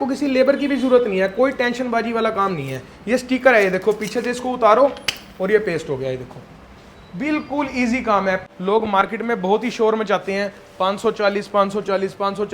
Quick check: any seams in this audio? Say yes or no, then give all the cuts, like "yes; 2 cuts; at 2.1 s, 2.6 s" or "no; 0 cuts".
yes; 1 cut; at 8.4 s